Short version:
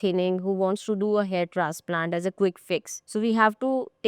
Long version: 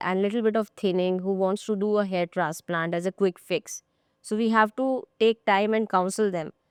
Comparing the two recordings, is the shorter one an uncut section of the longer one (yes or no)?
no